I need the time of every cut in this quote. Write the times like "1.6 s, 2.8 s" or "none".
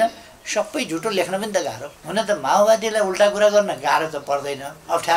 1.9 s